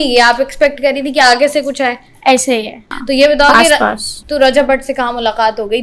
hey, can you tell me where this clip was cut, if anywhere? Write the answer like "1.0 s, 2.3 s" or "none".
2.8 s

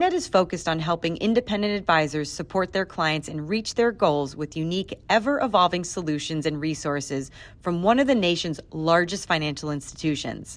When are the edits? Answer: none

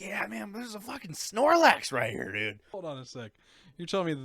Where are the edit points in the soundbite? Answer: 2.7 s

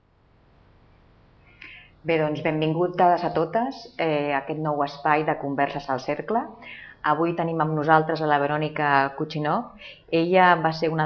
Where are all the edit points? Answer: none

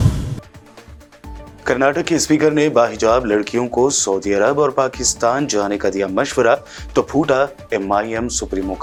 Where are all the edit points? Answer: none

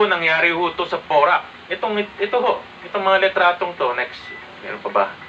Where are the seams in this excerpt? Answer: none

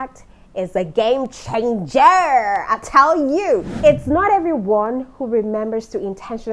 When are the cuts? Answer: 3.7 s

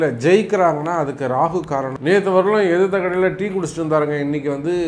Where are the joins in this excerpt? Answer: 1.9 s

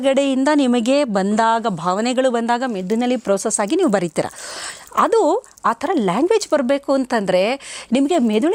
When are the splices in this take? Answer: none

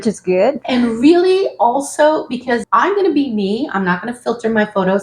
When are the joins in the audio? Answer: 2.6 s

